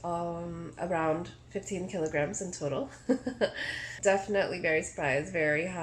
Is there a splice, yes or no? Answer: yes